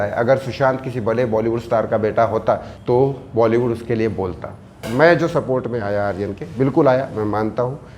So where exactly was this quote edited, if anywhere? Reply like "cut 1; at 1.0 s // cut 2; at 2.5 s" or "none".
cut 1; at 2.7 s // cut 2; at 4.8 s